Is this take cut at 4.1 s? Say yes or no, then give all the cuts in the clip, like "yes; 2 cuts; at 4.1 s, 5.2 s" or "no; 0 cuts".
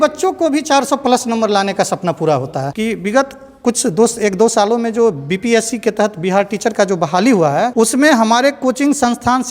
no; 2 cuts; at 2.7 s, 7.7 s